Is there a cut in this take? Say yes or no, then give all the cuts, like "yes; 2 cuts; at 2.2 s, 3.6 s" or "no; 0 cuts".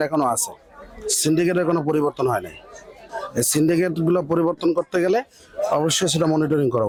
no; 0 cuts